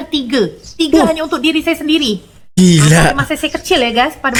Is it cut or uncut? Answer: uncut